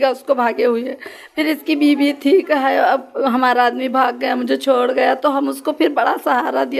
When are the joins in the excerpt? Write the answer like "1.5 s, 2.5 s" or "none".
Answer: none